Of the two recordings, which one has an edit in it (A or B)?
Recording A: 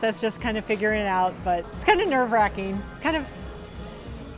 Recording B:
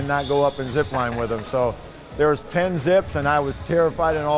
A